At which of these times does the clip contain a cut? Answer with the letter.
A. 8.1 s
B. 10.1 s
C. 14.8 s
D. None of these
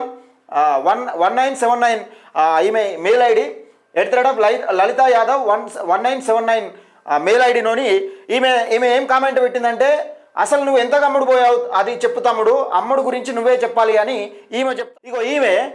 C